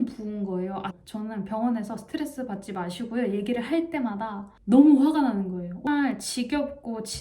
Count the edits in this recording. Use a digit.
2